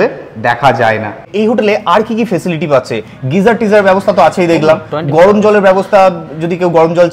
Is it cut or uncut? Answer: cut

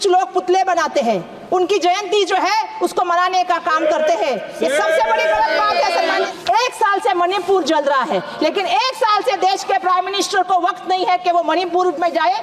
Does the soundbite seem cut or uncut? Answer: cut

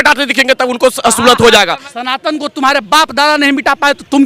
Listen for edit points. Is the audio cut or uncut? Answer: cut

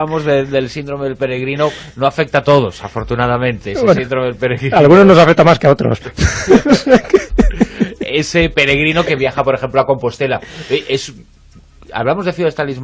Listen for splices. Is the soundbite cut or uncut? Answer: cut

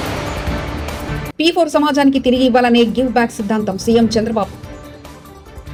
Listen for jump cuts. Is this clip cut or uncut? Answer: uncut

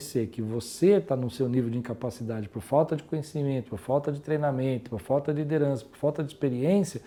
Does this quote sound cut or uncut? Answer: uncut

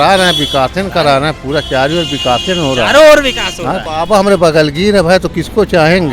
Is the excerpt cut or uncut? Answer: cut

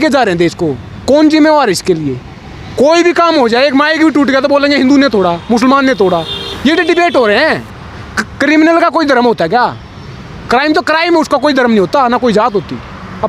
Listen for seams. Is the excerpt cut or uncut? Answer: uncut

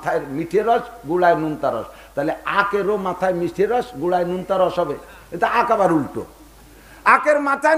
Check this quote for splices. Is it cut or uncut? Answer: uncut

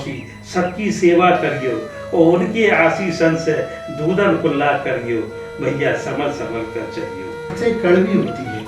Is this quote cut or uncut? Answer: cut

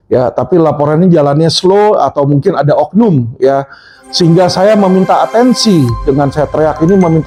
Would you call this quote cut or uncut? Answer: uncut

